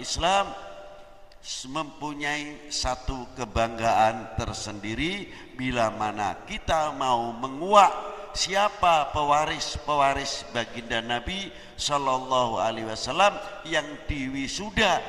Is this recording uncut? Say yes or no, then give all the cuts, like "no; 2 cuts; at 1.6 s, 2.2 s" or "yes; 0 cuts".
yes; 0 cuts